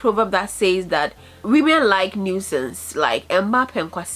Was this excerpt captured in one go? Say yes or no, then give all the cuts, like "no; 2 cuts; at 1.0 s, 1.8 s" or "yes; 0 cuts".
no; 1 cut; at 1.3 s